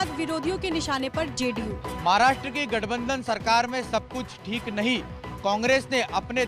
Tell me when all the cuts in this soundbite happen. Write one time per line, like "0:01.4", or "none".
0:01.8